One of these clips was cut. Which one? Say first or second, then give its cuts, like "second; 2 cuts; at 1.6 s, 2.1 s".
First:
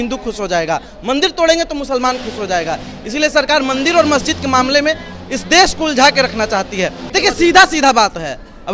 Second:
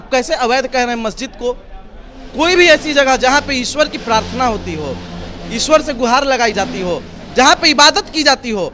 first; 1 cut; at 7.0 s